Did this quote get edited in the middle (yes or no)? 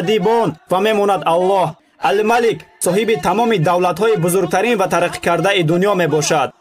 yes